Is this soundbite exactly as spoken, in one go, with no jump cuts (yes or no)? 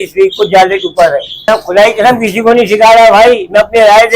no